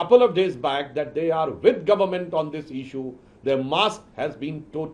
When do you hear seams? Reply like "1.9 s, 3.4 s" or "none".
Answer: none